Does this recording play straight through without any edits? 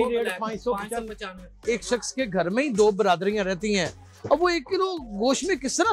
no; 1 cut; at 1.6 s

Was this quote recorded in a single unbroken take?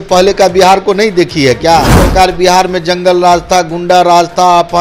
no; 1 cut; at 2.0 s

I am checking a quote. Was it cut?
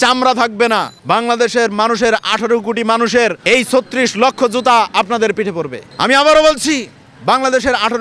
yes; 3 cuts; at 0.9 s, 3.4 s, 5.8 s

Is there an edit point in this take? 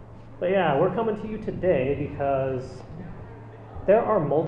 yes; 1 cut; at 2.4 s

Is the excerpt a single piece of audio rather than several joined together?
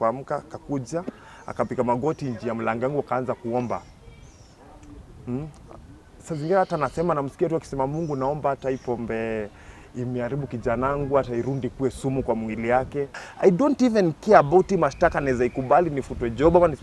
no; 1 cut; at 13.2 s

